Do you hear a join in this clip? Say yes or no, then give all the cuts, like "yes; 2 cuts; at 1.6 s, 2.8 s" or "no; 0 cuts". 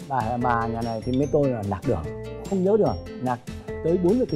yes; 1 cut; at 3.1 s